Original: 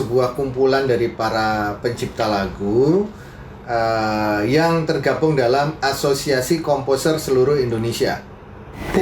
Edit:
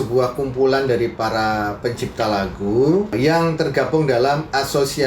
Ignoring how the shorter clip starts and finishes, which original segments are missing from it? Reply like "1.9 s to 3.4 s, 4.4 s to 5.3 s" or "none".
3.1 s to 4.4 s

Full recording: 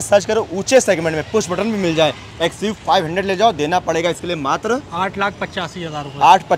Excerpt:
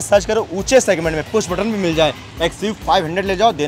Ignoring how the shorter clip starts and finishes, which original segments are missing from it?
none

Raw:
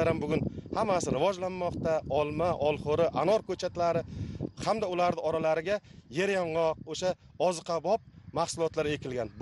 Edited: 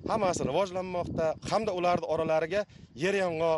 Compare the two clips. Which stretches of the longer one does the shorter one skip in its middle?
2.1 s to 4.5 s

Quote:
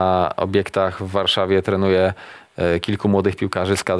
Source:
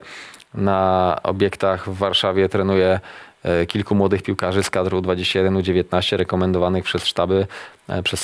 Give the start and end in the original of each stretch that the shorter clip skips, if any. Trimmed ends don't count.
none

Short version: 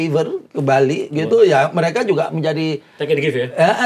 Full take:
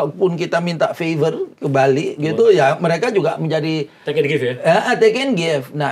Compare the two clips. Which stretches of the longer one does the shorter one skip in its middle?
none

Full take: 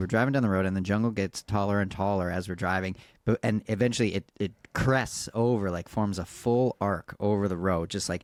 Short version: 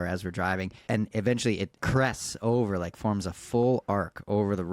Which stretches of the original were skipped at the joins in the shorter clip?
3.1 s to 3.4 s, 4.3 s to 4.6 s

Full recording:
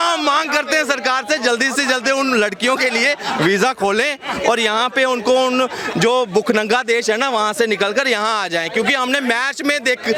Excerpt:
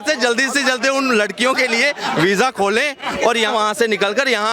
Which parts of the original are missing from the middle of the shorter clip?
4.7 s to 7.3 s

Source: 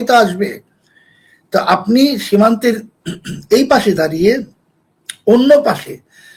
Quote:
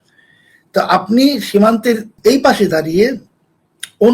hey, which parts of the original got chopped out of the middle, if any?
2.9 s to 3.4 s

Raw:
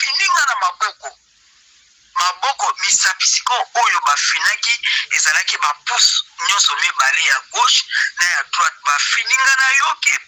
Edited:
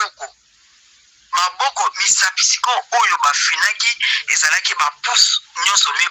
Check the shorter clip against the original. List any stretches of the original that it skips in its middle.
none

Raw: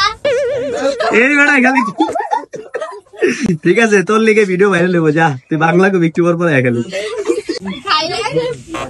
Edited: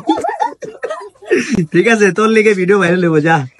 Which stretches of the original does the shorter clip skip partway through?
none

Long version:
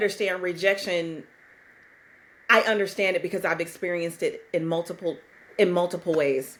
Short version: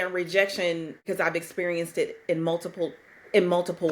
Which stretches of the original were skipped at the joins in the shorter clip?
1.3 s to 3.3 s

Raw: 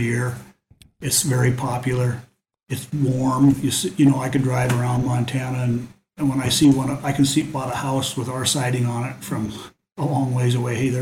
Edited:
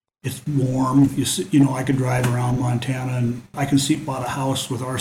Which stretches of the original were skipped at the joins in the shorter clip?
6.0 s to 7.0 s

